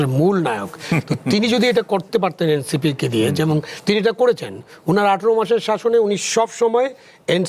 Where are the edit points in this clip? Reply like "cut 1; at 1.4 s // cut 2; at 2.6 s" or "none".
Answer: none